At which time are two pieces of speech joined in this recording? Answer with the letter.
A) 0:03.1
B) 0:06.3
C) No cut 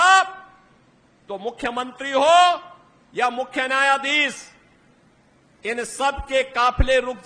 C